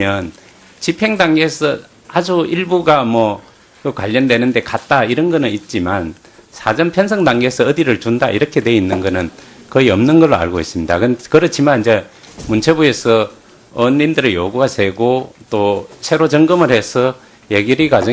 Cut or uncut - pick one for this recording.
uncut